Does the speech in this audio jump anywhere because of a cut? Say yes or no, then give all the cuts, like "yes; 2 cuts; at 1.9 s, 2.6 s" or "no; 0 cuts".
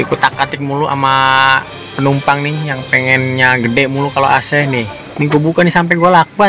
no; 0 cuts